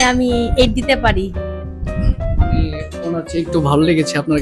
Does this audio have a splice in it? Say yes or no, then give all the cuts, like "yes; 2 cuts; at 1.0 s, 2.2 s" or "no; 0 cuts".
no; 0 cuts